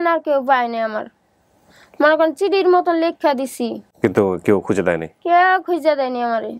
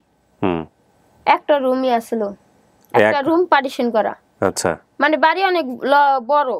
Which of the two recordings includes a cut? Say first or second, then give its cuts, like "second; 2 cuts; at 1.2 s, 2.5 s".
first; 1 cut; at 3.8 s